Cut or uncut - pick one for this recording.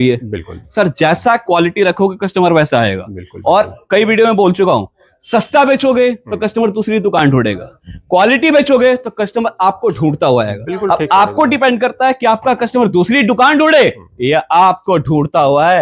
uncut